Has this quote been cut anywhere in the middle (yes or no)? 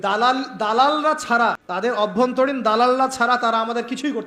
yes